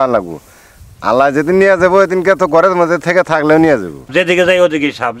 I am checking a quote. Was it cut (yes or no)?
yes